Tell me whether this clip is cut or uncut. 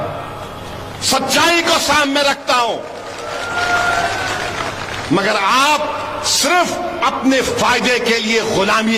uncut